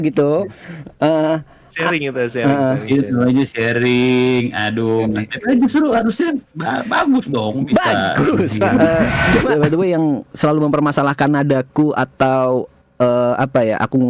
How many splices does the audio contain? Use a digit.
1